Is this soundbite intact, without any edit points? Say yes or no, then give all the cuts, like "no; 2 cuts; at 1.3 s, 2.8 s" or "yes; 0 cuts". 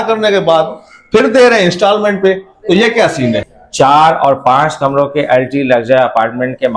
no; 1 cut; at 3.6 s